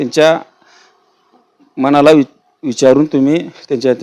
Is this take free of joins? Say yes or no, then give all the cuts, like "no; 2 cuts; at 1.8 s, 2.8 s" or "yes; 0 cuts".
yes; 0 cuts